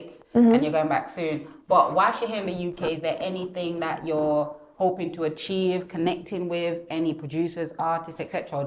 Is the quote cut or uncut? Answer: uncut